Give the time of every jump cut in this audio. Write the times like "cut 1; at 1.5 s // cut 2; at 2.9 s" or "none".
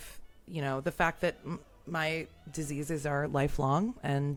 none